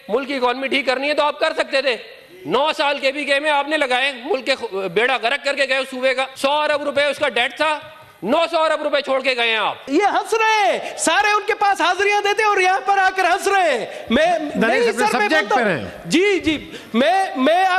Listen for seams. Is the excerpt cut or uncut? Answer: cut